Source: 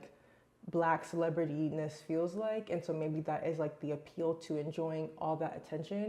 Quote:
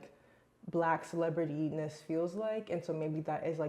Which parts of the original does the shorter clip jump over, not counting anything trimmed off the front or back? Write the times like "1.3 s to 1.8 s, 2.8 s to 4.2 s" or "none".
none